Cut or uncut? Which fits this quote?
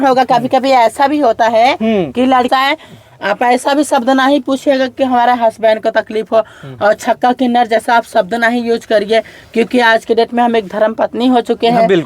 cut